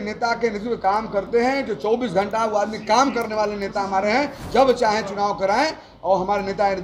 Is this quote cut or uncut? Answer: cut